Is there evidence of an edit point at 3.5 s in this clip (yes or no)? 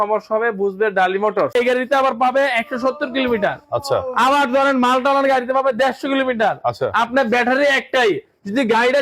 no